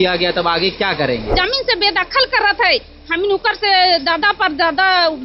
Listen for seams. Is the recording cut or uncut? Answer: cut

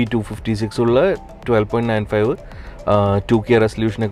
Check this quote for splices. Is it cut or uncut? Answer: uncut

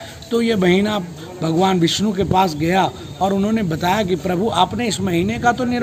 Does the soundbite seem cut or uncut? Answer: uncut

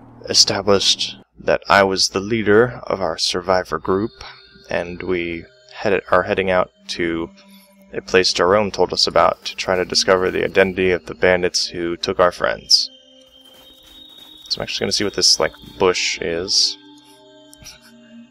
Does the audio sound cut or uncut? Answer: uncut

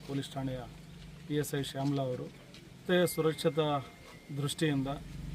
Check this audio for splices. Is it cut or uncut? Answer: cut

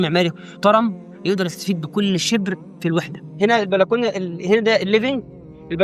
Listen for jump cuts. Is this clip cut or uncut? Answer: cut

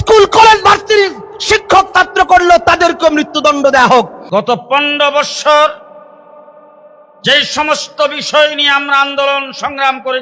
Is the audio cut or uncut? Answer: cut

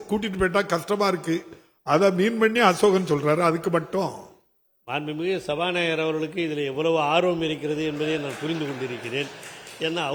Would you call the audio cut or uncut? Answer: uncut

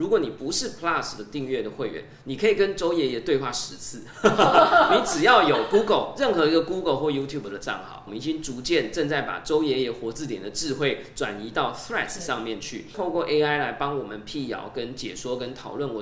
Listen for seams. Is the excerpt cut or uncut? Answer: cut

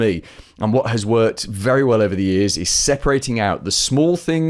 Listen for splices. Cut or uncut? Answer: uncut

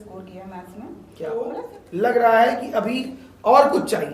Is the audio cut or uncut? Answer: cut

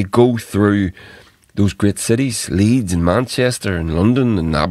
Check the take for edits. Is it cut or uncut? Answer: uncut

